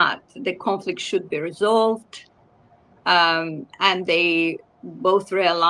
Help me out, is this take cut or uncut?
uncut